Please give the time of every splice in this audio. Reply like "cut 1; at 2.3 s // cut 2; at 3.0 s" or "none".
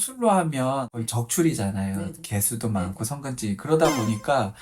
cut 1; at 1.0 s